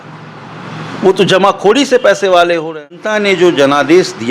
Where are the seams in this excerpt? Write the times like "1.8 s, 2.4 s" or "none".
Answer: 3.1 s